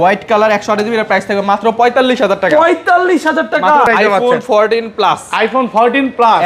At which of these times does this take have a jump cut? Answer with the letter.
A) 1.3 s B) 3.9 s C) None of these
B